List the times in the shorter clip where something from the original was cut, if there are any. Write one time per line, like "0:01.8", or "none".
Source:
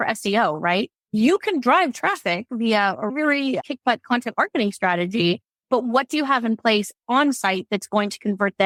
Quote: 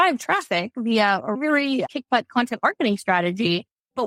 none